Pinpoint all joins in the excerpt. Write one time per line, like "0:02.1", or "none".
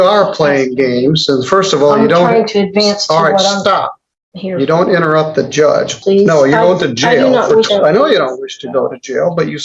0:06.0
0:07.7